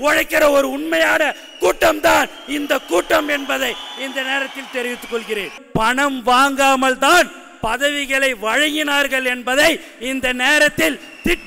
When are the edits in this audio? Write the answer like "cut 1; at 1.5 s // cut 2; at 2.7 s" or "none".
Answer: cut 1; at 5.5 s